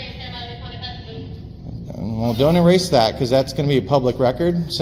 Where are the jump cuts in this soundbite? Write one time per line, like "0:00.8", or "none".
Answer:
none